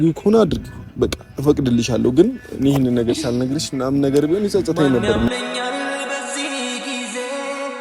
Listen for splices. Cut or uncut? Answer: cut